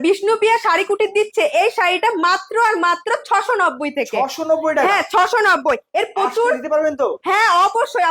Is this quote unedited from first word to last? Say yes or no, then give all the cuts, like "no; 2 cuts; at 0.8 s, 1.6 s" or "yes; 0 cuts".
yes; 0 cuts